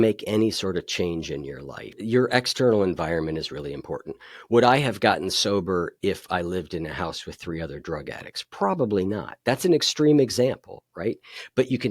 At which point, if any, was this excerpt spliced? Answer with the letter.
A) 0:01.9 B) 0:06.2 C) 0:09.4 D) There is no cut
A